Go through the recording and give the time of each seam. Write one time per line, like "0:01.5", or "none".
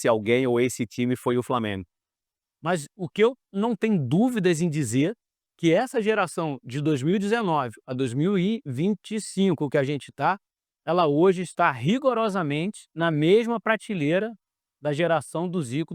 0:02.2